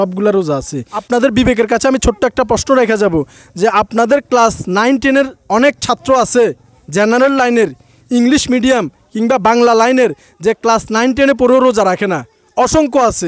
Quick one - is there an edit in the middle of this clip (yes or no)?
yes